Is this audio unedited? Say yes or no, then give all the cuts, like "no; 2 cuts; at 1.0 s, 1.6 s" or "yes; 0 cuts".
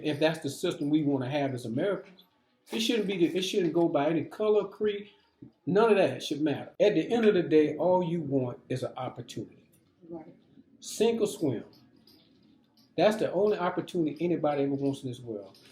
no; 1 cut; at 6.7 s